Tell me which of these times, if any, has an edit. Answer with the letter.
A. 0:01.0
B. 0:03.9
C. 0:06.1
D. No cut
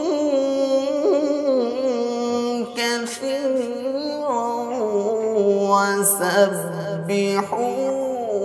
D